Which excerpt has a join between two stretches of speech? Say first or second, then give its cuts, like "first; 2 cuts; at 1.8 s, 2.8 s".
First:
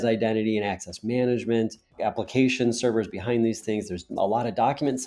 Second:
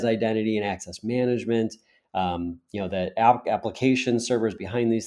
first; 1 cut; at 2.0 s